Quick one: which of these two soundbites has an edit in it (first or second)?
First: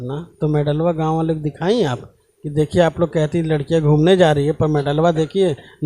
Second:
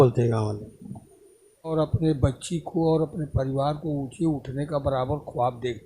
second